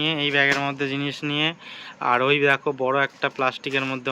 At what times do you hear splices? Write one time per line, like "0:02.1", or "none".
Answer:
none

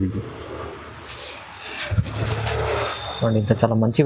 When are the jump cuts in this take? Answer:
none

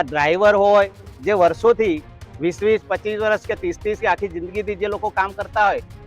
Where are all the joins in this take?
0:01.1

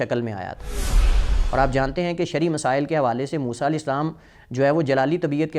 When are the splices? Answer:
0:01.0

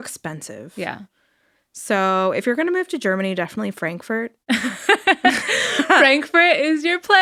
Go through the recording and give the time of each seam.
none

